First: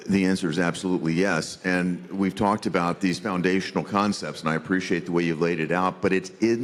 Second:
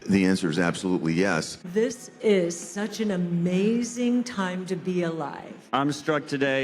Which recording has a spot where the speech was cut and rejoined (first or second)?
second